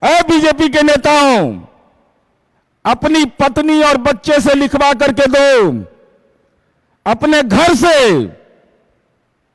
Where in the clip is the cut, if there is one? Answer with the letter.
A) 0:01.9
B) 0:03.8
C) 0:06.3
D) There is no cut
D